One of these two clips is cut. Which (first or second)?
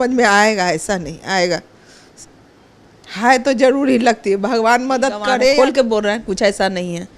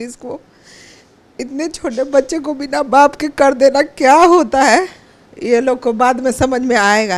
first